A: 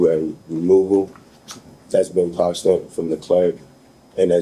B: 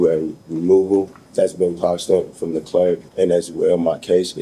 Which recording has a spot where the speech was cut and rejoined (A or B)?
B